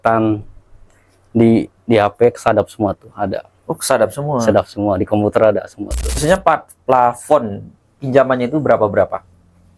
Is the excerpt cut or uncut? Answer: cut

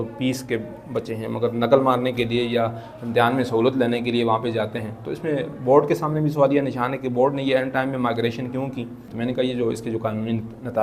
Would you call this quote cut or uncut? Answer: cut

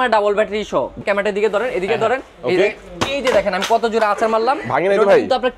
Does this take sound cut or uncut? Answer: cut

